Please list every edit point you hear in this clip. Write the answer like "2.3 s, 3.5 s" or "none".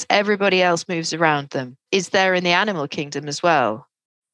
1.8 s